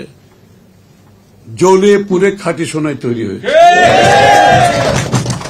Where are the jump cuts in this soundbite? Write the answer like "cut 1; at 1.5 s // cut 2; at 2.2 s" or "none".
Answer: none